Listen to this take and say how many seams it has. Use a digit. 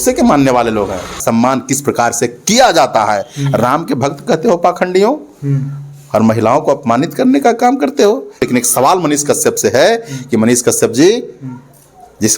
2